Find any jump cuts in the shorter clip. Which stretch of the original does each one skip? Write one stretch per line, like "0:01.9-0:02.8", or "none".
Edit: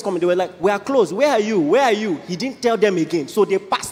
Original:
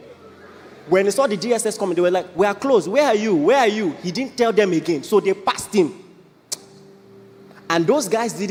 none